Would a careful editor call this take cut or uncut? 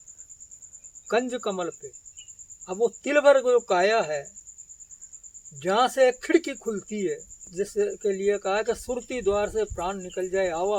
cut